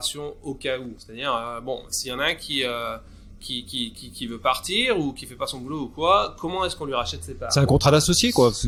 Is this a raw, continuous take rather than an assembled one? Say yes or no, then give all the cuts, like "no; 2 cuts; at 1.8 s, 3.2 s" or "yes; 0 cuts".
yes; 0 cuts